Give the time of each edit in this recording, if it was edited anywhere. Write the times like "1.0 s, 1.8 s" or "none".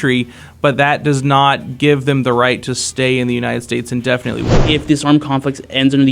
4.5 s